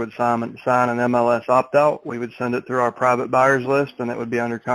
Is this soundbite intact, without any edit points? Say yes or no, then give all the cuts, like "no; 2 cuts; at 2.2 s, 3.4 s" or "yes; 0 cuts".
yes; 0 cuts